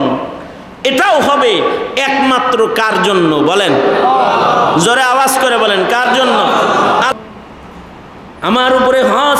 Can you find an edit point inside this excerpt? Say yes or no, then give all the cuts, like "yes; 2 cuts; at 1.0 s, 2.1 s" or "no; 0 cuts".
yes; 1 cut; at 7.1 s